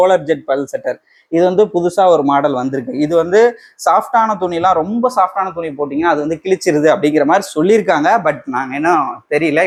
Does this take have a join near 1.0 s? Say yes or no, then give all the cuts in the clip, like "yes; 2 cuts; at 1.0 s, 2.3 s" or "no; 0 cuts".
no; 0 cuts